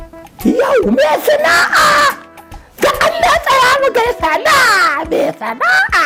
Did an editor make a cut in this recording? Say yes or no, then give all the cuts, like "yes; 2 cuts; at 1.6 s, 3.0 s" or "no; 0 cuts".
no; 0 cuts